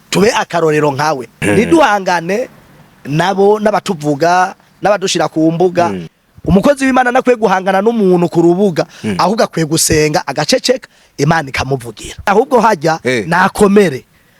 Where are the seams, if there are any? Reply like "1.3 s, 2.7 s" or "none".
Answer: 1.4 s, 6.1 s, 12.3 s